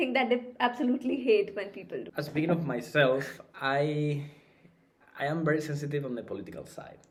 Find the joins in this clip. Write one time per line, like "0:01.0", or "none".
none

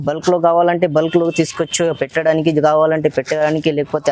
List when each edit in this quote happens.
none

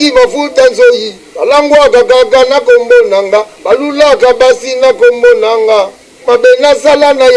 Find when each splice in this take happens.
none

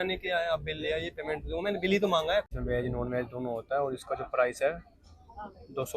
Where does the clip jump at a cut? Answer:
0:02.5

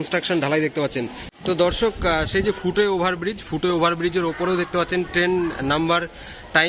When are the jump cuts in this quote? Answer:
0:01.3

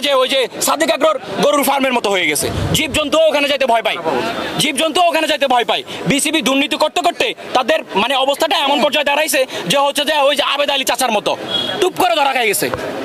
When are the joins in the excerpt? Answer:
none

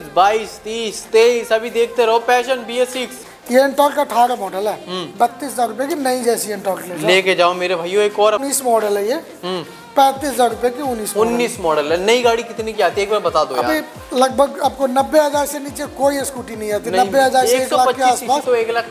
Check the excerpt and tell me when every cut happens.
0:03.2
0:08.5

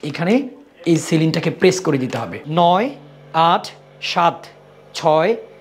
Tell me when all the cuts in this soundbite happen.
0:02.4

